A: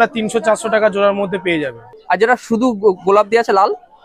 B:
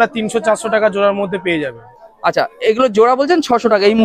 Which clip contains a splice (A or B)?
A